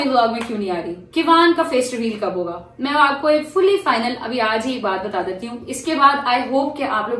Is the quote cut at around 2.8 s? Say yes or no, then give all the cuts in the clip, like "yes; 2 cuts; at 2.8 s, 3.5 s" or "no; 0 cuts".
no; 0 cuts